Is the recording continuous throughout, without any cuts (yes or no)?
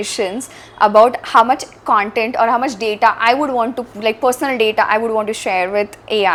yes